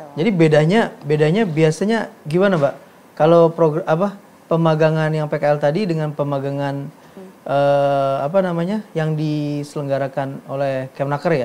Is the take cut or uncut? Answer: uncut